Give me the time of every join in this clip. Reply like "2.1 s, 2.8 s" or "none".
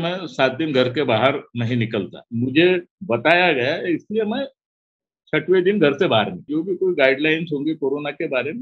2.2 s, 6.5 s